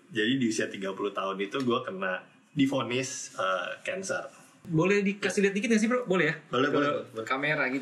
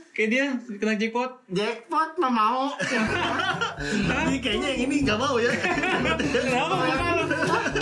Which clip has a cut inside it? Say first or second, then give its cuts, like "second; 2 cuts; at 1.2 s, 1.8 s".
first; 1 cut; at 4.6 s